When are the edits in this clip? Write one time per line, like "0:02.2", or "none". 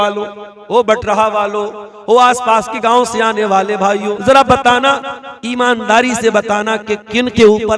0:04.1